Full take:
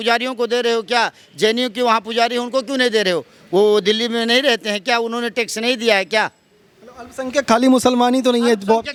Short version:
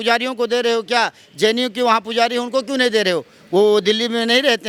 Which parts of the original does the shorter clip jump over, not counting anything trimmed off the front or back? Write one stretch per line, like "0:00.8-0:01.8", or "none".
none